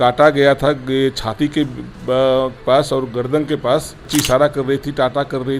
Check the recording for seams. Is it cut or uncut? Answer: cut